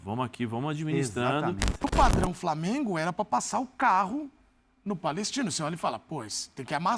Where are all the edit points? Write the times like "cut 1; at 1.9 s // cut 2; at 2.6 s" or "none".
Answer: cut 1; at 1.8 s